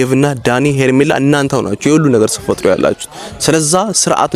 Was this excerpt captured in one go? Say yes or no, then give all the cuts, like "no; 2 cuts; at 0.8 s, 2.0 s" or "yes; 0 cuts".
yes; 0 cuts